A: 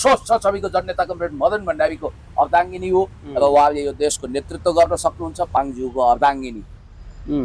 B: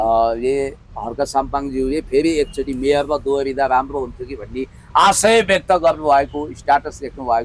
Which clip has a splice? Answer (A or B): A